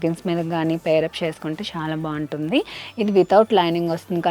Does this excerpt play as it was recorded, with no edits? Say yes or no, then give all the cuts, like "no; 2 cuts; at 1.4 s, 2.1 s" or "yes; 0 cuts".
yes; 0 cuts